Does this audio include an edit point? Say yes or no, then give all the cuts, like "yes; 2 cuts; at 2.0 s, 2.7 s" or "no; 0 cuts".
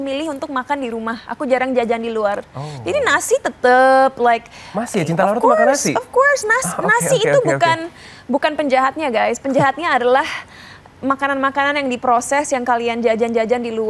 no; 0 cuts